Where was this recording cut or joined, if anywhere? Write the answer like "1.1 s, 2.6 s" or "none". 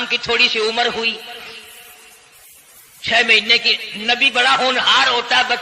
none

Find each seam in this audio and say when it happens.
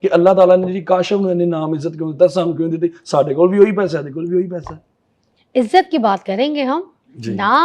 none

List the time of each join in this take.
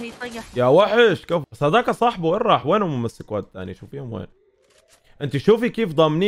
1.5 s

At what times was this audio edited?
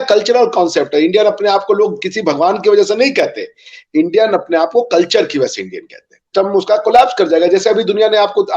6.3 s

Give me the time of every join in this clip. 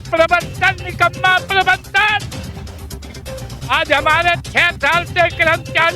none

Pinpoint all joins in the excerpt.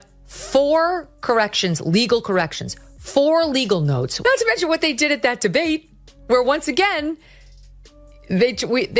4.1 s

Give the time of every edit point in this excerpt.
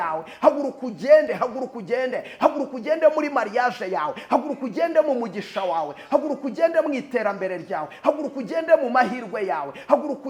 none

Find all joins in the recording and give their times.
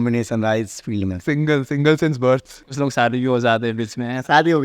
2.6 s

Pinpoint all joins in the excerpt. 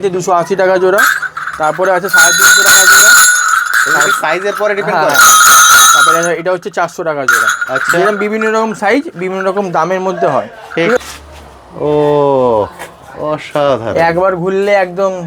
11.0 s

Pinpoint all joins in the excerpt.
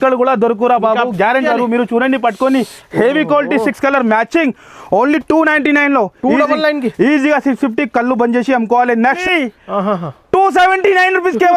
1.4 s, 9.2 s

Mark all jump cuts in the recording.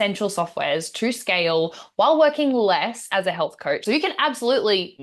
3.8 s

